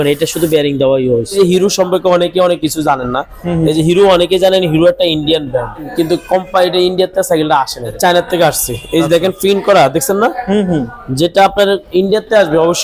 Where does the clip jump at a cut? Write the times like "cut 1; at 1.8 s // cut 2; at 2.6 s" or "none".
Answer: cut 1; at 1.4 s // cut 2; at 5.9 s // cut 3; at 8.0 s